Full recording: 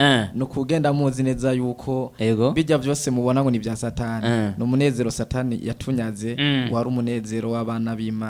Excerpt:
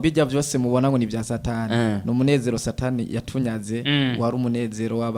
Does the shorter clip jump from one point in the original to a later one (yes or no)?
no